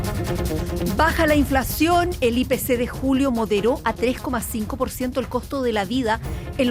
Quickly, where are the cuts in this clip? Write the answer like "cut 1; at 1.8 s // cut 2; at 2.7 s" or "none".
cut 1; at 1.0 s